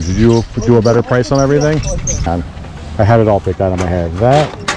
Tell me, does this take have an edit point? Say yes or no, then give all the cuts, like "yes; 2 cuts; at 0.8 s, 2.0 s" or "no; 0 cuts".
yes; 1 cut; at 2.3 s